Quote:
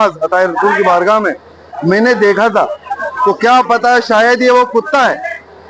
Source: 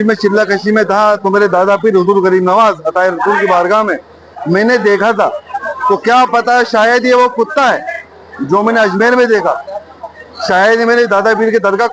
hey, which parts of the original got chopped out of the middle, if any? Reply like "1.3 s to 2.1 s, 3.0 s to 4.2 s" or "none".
none